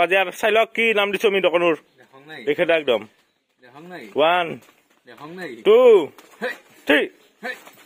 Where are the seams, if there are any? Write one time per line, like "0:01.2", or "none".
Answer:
none